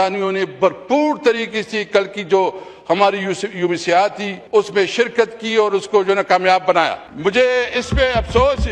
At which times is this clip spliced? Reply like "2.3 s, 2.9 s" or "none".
4.3 s, 7.0 s